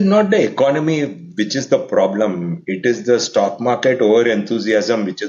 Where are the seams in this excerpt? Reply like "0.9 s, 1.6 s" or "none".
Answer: none